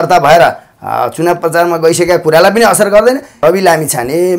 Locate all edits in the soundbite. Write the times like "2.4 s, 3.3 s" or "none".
3.4 s